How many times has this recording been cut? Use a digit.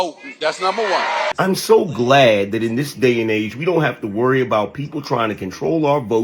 1